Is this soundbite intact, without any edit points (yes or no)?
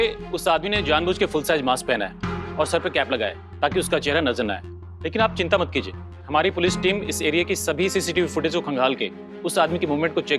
yes